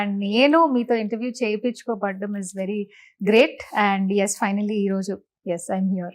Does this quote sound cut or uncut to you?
uncut